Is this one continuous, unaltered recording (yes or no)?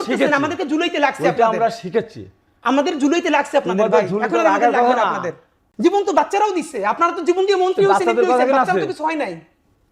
no